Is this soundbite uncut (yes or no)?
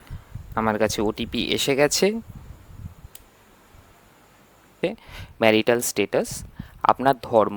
no